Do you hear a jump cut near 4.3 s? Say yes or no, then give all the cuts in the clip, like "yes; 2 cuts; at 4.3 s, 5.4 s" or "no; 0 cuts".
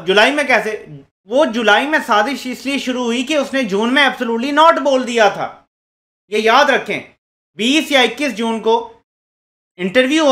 no; 0 cuts